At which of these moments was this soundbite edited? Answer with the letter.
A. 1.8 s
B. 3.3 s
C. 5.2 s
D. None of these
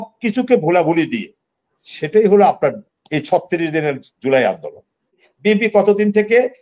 C